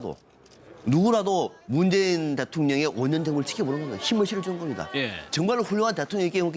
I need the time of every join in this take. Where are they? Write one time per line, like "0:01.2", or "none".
0:04.2